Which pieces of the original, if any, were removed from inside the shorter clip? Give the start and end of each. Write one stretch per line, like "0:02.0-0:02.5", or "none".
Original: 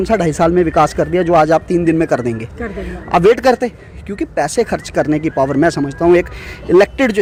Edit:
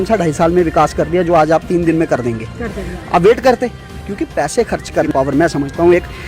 0:05.1-0:05.3